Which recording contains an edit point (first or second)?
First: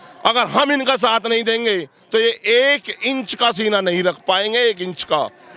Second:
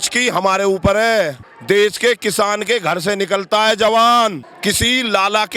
second